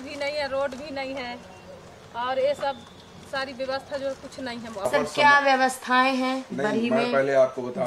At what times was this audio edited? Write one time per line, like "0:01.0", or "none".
0:04.7